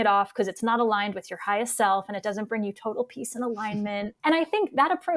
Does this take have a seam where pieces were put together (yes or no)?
yes